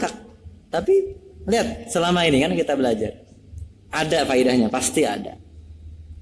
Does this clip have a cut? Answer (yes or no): no